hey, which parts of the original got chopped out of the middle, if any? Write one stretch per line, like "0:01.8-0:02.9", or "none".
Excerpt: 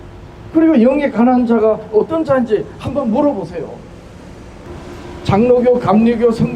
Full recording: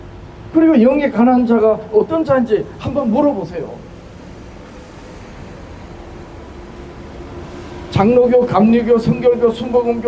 0:04.6-0:07.3